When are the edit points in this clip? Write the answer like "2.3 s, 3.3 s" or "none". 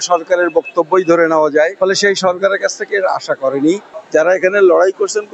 1.7 s, 3.9 s